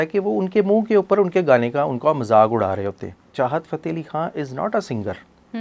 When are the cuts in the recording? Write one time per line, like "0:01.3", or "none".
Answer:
0:03.2